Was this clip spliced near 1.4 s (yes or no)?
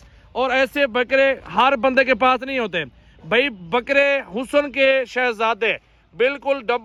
no